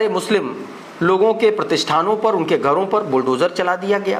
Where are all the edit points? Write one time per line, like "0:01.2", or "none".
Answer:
none